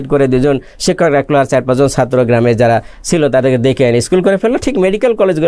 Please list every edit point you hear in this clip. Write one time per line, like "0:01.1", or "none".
none